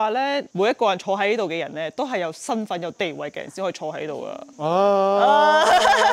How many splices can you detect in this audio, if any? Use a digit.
0